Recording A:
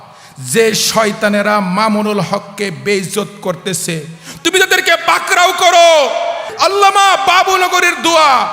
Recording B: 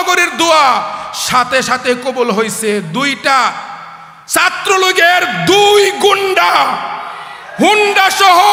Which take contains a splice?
A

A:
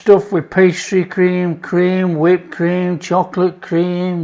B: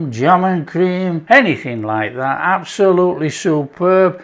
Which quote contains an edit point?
B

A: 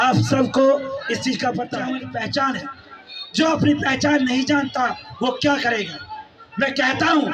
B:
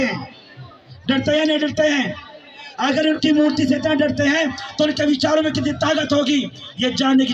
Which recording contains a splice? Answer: A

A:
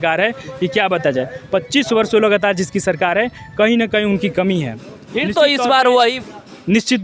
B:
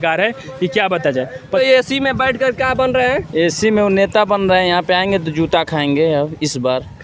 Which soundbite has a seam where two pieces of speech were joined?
B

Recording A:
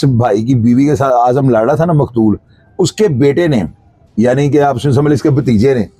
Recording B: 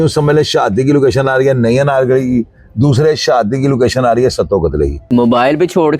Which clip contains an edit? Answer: B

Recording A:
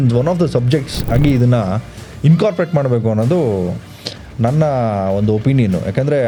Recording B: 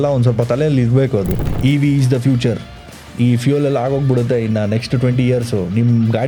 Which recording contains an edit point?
B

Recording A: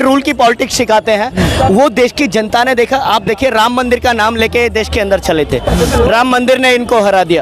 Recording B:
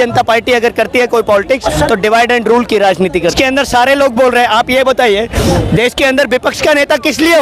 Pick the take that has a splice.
B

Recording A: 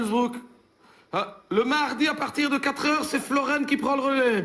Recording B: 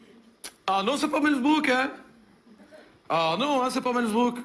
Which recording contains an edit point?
B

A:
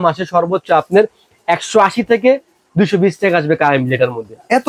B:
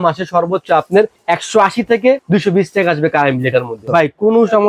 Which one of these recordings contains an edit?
B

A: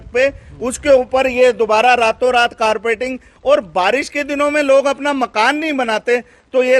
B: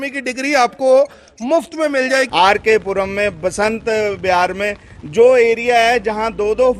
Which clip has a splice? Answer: B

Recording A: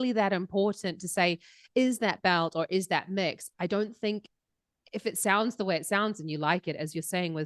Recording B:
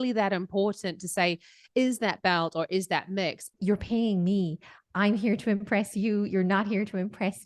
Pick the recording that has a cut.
B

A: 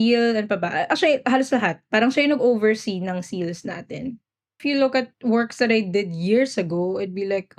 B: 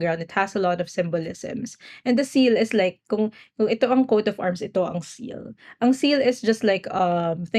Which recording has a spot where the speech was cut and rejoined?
A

